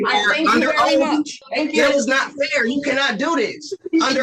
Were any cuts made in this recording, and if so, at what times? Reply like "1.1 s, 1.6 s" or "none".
1.4 s